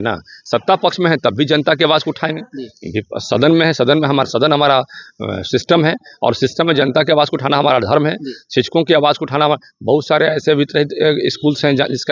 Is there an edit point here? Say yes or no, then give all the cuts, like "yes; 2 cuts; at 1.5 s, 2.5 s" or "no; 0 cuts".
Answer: no; 0 cuts